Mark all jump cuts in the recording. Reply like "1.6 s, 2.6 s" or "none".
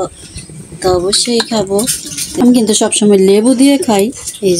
2.2 s